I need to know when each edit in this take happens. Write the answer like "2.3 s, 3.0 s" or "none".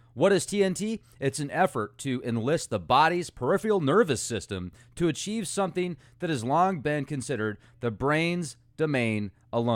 6.1 s

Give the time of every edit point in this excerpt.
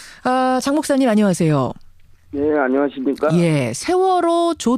3.6 s

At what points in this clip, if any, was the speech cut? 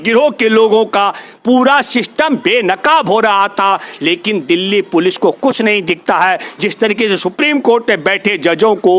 none

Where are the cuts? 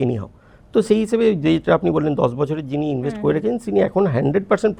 none

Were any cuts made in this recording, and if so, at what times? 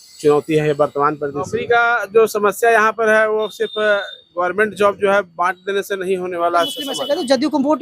1.5 s, 6.9 s

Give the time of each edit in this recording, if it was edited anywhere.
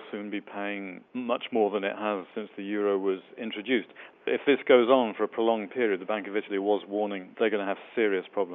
4.3 s, 7.2 s

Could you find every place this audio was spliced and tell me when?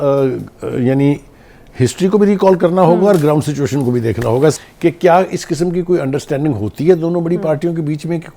4.6 s

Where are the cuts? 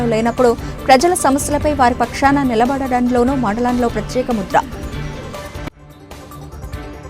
4.6 s

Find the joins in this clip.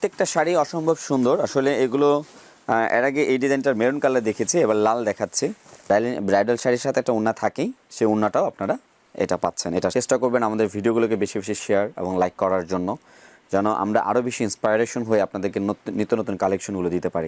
5.7 s, 9.9 s

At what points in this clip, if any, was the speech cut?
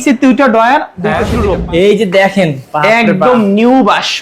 1.4 s

